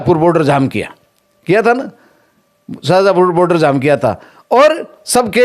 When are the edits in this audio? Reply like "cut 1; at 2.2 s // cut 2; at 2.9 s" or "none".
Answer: none